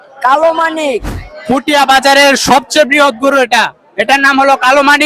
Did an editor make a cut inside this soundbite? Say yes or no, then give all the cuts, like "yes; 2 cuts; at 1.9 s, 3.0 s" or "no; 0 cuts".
yes; 1 cut; at 1.1 s